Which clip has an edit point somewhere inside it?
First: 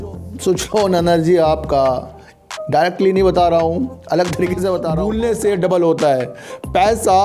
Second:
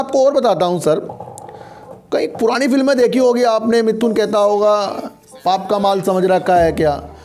first; 1 cut; at 5.0 s

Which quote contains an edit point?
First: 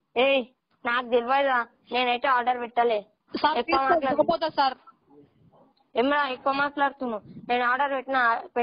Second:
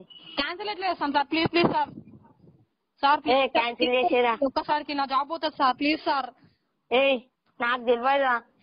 first; 1 cut; at 6.9 s

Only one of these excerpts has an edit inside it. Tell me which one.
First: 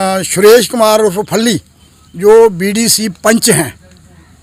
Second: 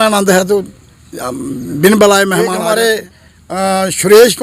second; 1 cut; at 2.5 s

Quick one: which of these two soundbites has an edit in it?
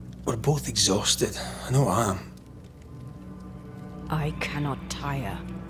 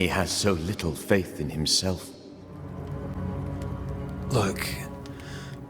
second; 1 cut; at 2.6 s

